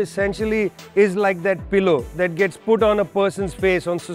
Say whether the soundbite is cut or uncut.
uncut